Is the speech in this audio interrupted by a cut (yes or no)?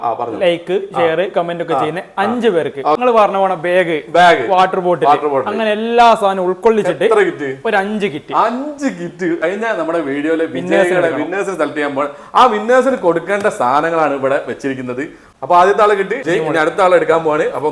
yes